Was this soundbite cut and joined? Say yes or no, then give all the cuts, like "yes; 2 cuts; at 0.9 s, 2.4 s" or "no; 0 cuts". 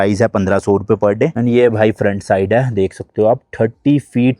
yes; 1 cut; at 1.4 s